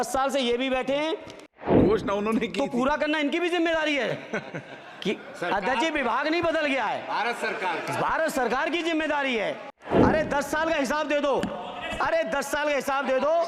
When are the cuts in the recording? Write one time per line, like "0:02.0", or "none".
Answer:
0:01.6
0:09.8